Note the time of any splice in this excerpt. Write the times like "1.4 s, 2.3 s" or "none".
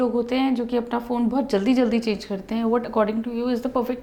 none